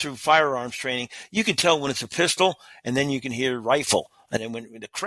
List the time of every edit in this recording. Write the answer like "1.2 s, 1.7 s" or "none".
none